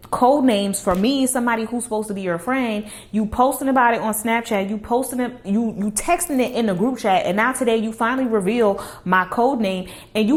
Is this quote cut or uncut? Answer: uncut